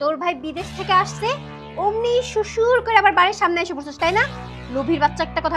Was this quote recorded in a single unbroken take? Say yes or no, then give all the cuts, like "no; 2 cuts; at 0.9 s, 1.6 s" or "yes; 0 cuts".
yes; 0 cuts